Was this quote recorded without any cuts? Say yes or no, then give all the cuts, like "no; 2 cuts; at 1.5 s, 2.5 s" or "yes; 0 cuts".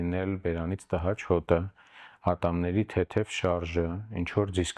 yes; 0 cuts